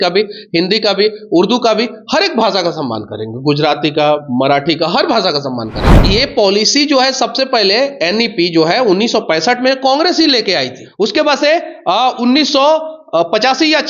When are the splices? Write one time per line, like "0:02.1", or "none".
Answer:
0:06.0
0:10.8